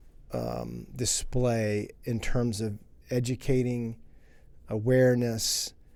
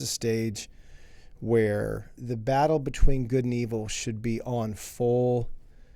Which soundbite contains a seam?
second; 1 cut; at 2.2 s

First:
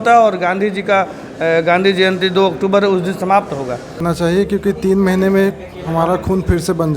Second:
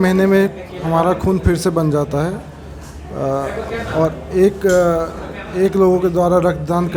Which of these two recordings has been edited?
first; 1 cut; at 4.0 s

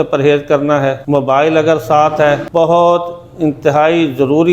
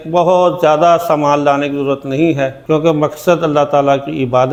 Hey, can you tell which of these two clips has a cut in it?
first; 2 cuts; at 1.0 s, 2.4 s

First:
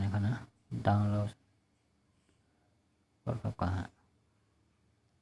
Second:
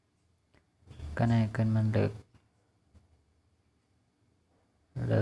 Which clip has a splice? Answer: second; 1 cut; at 2.3 s

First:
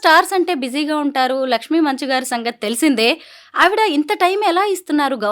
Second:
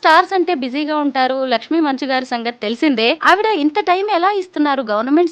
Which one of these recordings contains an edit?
second; 1 cut; at 3.2 s

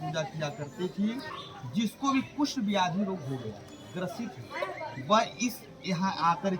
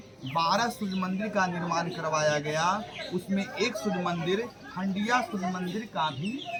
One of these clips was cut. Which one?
first; 1 cut; at 1.4 s

